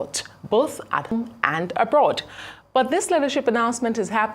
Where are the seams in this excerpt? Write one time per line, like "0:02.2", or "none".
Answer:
0:01.1